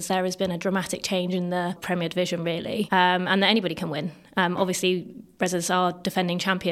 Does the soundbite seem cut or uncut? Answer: cut